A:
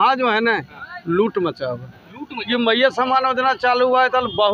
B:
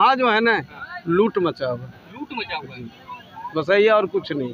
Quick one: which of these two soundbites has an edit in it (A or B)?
A